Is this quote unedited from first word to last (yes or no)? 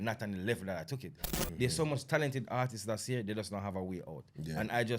no